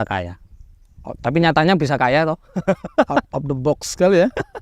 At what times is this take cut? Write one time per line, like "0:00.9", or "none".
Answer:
none